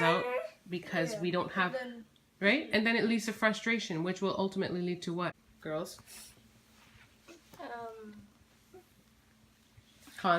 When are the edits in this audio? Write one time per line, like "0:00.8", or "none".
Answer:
0:05.5